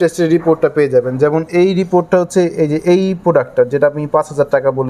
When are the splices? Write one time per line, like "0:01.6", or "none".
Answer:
none